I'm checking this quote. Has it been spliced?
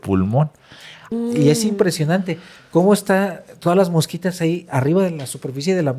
yes; 1 cut; at 1.0 s

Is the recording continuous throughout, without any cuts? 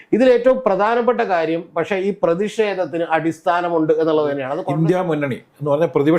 no; 1 cut; at 4.6 s

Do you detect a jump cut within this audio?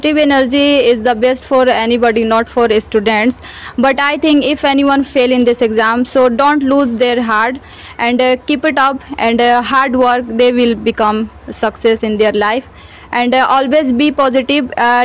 no; 0 cuts

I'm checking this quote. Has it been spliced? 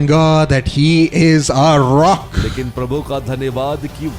yes; 1 cut; at 2.4 s

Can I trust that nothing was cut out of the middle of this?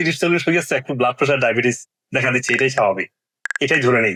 yes; 0 cuts

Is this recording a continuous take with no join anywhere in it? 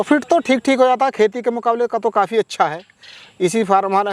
yes; 0 cuts

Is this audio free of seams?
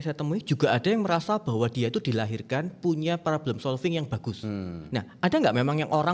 yes; 0 cuts

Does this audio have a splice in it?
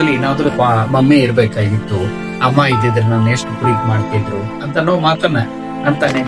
no; 0 cuts

